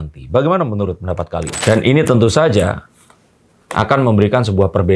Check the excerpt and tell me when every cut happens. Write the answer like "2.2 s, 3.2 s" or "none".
1.5 s